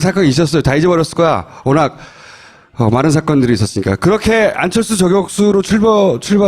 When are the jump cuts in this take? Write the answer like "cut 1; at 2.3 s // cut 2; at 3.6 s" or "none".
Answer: cut 1; at 1.5 s